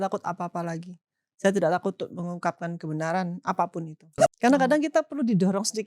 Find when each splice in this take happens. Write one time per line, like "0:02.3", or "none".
0:04.0